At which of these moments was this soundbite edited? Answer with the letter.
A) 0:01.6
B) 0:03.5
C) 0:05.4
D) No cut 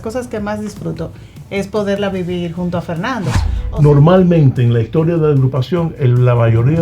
B